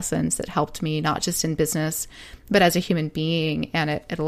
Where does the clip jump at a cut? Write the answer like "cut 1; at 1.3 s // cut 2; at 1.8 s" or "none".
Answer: none